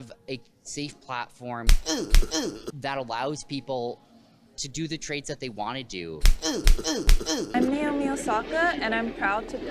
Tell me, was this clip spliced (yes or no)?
no